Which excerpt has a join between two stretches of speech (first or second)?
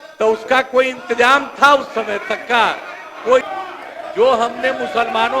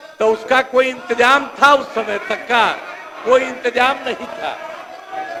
first